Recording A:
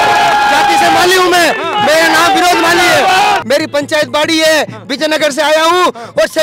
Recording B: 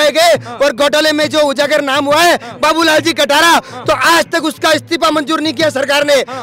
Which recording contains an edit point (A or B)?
A